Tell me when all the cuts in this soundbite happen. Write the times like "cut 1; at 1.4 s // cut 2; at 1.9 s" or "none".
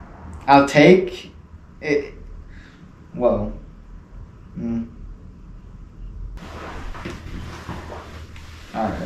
none